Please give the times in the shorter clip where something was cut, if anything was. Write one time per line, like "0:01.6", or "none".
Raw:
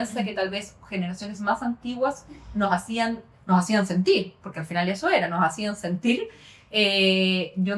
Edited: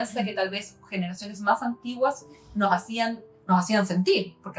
none